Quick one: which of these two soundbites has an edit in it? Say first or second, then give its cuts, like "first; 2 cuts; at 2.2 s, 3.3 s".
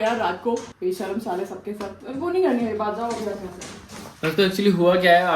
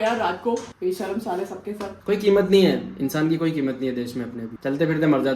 second; 1 cut; at 1.9 s